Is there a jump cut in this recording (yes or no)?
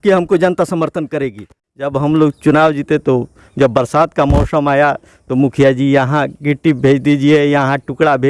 yes